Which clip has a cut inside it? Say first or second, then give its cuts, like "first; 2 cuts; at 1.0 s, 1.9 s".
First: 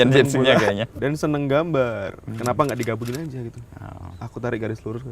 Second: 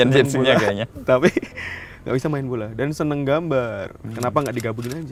first; 1 cut; at 0.9 s